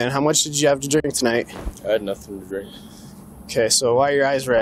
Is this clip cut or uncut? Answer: uncut